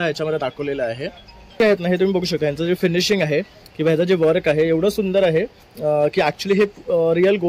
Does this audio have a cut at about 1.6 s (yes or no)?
yes